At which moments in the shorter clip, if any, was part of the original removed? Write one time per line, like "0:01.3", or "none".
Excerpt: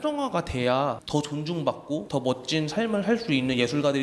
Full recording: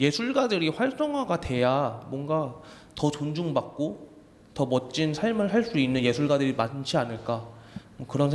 0:01.0
0:02.1